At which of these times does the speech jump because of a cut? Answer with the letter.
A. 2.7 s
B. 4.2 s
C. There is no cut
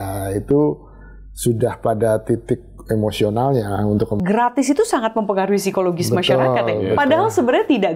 B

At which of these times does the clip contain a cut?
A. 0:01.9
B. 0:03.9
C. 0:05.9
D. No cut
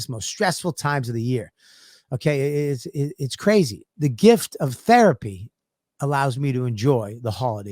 B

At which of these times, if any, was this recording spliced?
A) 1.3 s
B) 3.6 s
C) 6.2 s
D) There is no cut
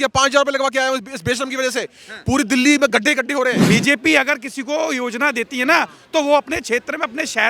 B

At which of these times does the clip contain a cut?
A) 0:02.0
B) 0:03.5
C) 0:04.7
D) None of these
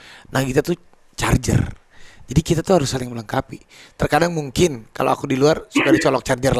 D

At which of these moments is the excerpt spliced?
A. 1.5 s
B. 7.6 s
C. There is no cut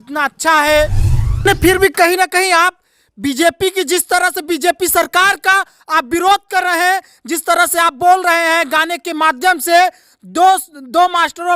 A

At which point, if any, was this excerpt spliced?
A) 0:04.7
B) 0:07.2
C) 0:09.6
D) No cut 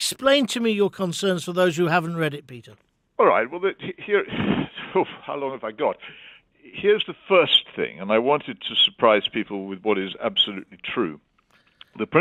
D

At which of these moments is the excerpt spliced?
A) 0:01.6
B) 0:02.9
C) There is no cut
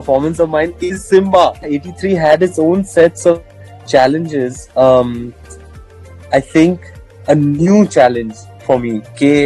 A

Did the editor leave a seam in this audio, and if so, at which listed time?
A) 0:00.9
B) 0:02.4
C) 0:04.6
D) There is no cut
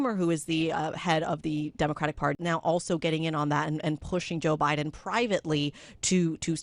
B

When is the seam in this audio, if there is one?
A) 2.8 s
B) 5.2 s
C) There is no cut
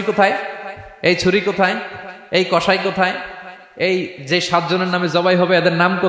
C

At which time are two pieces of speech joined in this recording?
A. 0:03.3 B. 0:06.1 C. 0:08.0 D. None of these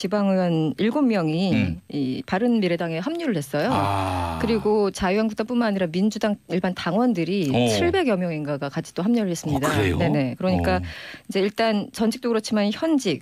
C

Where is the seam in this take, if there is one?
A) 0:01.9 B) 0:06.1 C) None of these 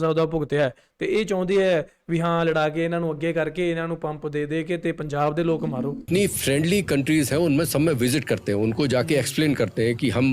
B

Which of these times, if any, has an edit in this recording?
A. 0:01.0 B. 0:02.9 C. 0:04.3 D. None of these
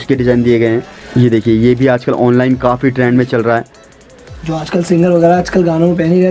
A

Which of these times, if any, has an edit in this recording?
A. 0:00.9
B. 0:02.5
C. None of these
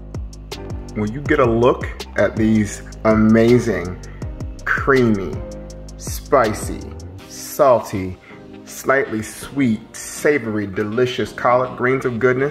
A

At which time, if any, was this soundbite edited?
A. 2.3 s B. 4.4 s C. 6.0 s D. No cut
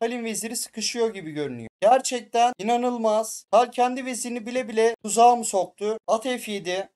C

